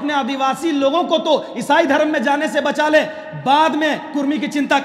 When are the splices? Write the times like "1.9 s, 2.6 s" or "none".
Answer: none